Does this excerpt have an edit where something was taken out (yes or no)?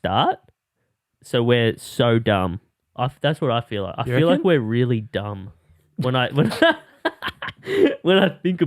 no